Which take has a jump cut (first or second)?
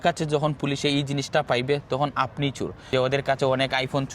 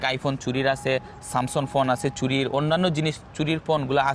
first